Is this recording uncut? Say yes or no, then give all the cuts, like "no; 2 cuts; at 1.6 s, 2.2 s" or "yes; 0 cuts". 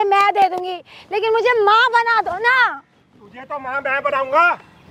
yes; 0 cuts